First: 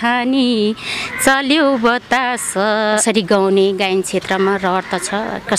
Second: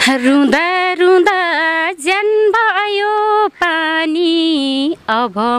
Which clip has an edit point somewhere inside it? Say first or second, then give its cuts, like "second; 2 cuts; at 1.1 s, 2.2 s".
first; 1 cut; at 3.0 s